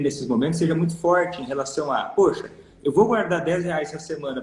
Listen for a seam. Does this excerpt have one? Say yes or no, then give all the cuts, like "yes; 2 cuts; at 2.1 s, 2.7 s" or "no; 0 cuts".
no; 0 cuts